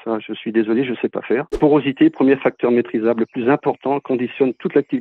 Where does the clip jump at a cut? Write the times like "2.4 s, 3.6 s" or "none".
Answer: 1.5 s